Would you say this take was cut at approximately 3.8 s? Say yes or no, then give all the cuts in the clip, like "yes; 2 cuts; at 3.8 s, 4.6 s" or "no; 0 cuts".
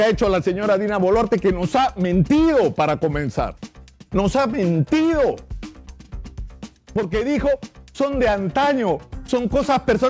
no; 2 cuts; at 5.4 s, 6.9 s